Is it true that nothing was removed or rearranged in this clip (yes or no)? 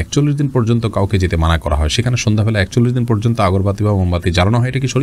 yes